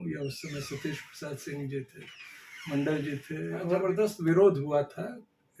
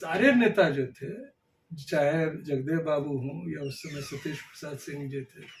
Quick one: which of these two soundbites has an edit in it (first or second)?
first